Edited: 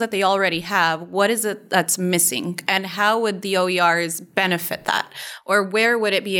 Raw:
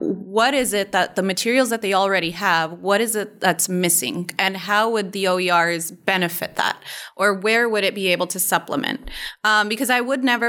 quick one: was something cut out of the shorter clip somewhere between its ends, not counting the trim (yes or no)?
no